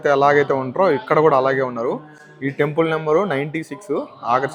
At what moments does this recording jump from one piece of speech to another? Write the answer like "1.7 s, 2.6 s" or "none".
none